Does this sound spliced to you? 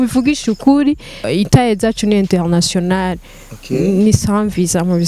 yes; 1 cut; at 1.2 s

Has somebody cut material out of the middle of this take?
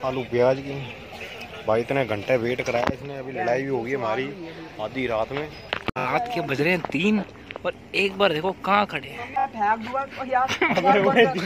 yes; 2 cuts; at 5.9 s, 9.4 s

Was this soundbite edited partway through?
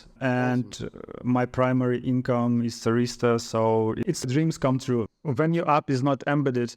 yes; 1 cut; at 5.2 s

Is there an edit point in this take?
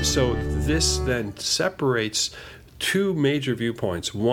no; 0 cuts

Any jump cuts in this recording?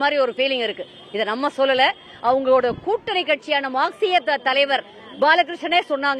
no; 0 cuts

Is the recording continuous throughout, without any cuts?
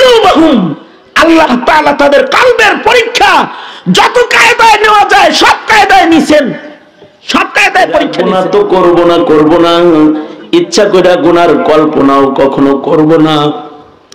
no; 1 cut; at 8.2 s

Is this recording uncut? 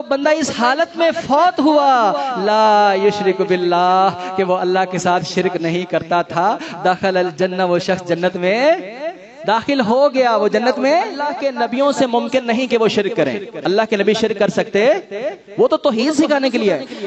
no; 1 cut; at 11.2 s

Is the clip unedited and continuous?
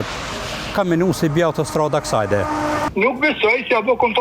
no; 1 cut; at 2.8 s

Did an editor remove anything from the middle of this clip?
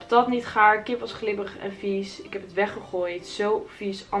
no; 0 cuts

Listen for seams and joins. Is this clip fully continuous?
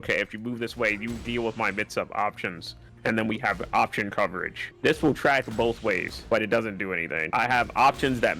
no; 3 cuts; at 4.7 s, 6.1 s, 7.2 s

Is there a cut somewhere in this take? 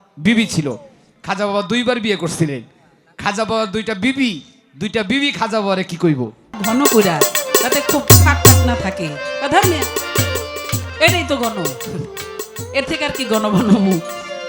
yes; 1 cut; at 6.6 s

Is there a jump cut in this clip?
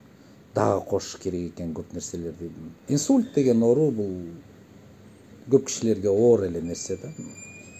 yes; 1 cut; at 2.8 s

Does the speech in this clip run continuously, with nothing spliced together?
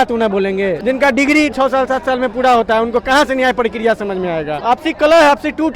no; 3 cuts; at 0.8 s, 1.5 s, 4.5 s

